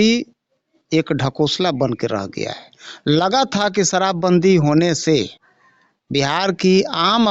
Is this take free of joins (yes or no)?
yes